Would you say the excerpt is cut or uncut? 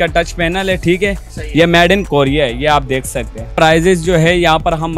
cut